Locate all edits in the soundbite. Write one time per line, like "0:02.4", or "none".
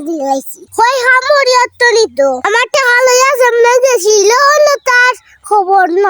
0:02.4